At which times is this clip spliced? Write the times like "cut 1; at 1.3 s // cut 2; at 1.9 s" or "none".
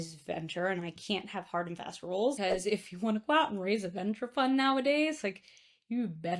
cut 1; at 2.4 s

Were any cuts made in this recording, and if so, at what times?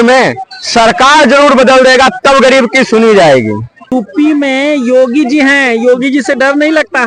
cut 1; at 3.9 s

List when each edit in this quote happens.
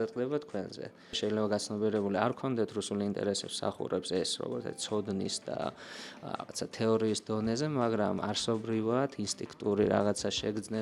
cut 1; at 1.2 s

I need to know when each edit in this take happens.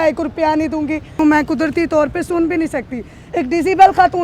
cut 1; at 1.2 s

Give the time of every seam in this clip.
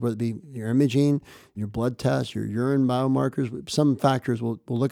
cut 1; at 1.5 s

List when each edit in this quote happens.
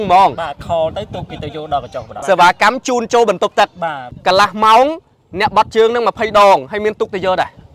cut 1; at 2.1 s // cut 2; at 4.1 s

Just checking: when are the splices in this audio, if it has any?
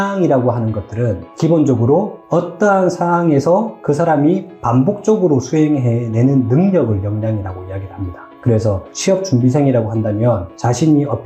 none

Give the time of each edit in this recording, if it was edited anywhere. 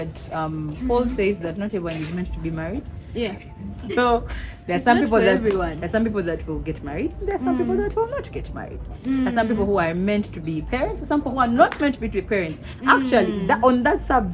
none

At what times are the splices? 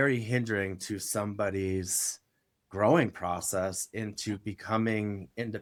none

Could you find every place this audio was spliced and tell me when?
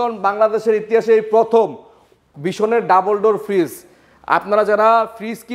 none

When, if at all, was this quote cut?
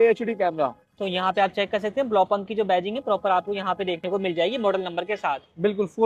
none

